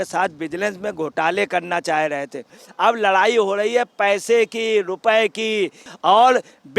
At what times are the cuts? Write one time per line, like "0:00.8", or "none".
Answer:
0:02.6
0:05.9